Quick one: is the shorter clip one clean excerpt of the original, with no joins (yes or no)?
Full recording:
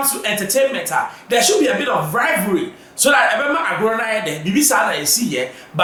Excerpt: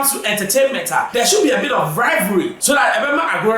no